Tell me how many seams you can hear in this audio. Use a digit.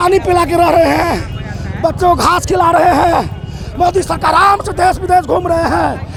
0